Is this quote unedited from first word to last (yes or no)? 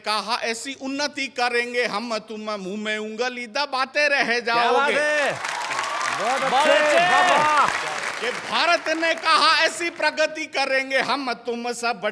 no